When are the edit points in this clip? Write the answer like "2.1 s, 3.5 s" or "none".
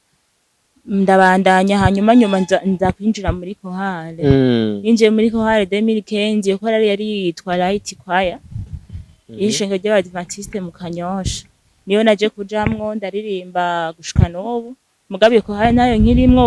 none

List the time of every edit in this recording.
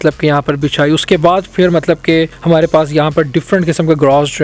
2.4 s

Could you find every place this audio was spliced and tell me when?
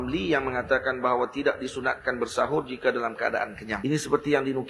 3.7 s

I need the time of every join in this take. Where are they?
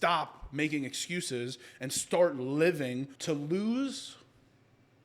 3.1 s

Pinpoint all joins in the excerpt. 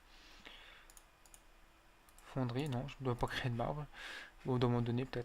3.4 s

